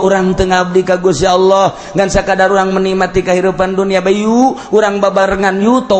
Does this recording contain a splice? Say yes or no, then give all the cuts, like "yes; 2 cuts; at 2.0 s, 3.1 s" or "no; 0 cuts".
no; 0 cuts